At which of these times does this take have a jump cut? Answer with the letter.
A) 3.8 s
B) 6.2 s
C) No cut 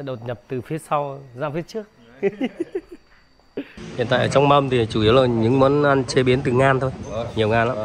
A